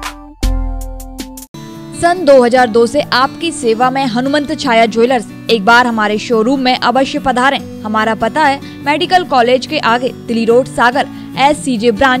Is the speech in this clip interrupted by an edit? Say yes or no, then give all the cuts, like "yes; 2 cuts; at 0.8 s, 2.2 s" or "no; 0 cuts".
no; 0 cuts